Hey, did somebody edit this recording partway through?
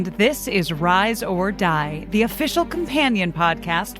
no; 0 cuts

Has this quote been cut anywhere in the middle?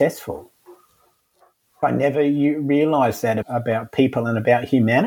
yes; 2 cuts; at 1.8 s, 3.4 s

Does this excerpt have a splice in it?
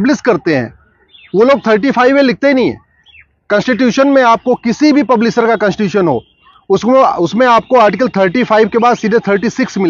no; 0 cuts

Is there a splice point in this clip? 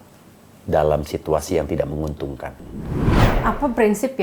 yes; 1 cut; at 3.2 s

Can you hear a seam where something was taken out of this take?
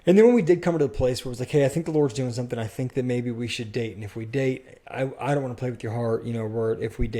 no; 0 cuts

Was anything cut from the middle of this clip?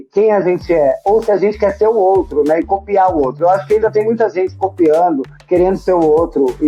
no; 0 cuts

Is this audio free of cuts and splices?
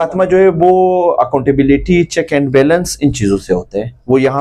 yes; 0 cuts

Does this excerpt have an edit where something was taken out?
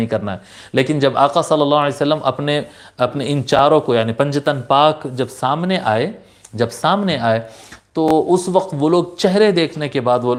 no; 0 cuts

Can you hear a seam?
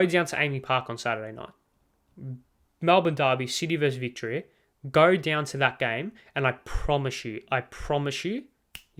no; 0 cuts

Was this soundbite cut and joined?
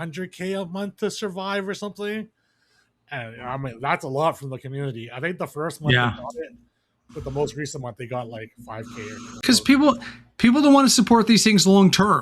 yes; 1 cut; at 9.4 s

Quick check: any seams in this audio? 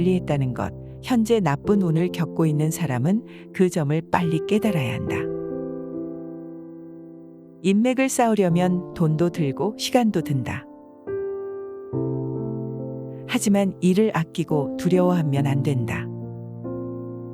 yes; 2 cuts; at 5.5 s, 7.4 s

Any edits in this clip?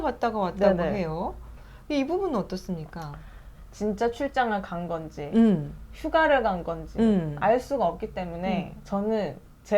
no; 0 cuts

